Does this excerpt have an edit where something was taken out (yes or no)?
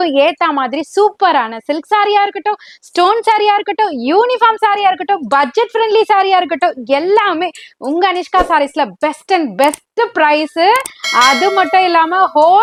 no